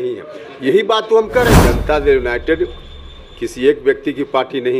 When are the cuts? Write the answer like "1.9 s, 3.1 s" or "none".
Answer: 1.7 s

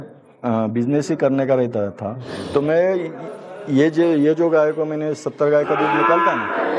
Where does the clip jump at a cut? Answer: none

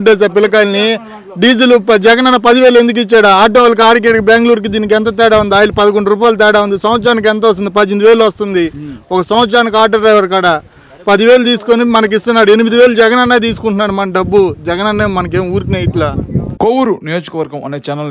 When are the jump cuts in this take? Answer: 16.5 s

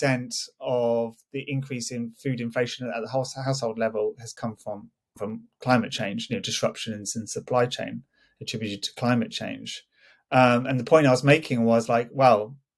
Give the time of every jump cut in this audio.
none

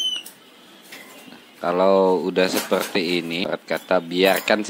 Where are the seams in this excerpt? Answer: 3.5 s

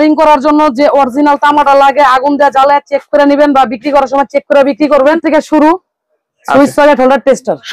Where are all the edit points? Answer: 5.2 s

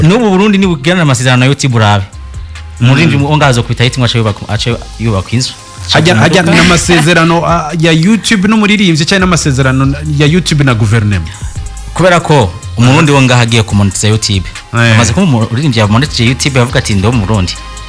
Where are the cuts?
none

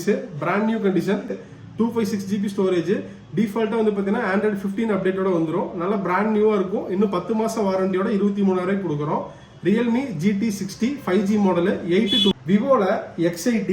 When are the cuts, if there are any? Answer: 1.4 s, 12.3 s

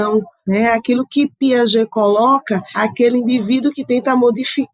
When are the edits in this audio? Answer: 2.7 s

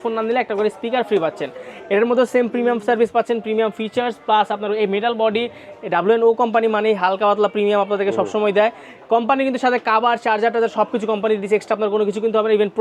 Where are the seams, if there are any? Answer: none

